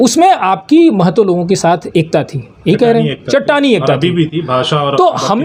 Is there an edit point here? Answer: no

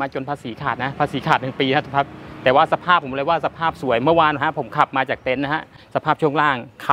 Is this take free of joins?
no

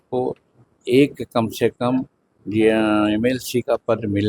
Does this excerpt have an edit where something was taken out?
no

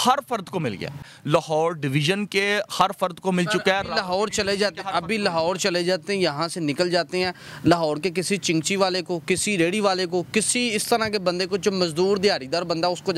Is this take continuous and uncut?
no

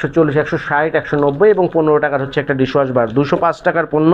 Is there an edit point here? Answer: no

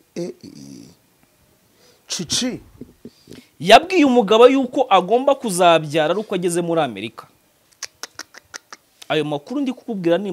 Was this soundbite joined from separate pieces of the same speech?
no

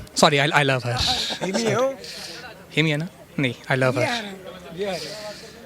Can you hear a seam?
no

